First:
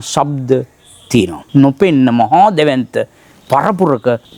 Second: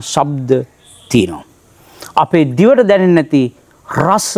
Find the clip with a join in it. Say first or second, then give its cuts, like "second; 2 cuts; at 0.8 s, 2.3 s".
first; 1 cut; at 1.4 s